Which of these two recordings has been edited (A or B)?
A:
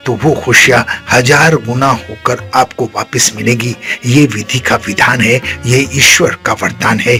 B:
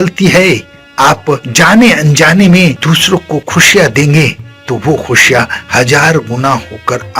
B